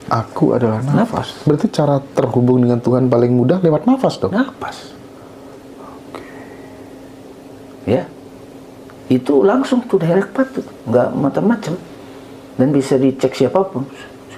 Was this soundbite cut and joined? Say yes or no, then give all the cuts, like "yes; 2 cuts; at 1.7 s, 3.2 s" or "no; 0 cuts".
no; 0 cuts